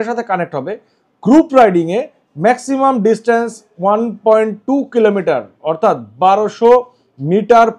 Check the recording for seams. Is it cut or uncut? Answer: uncut